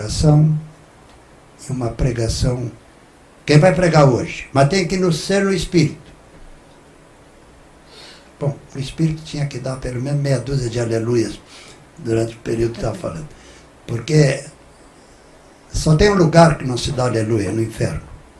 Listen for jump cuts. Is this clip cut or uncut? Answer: uncut